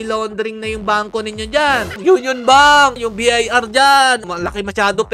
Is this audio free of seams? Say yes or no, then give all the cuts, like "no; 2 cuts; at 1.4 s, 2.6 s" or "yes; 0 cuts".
no; 3 cuts; at 1.9 s, 3.0 s, 4.2 s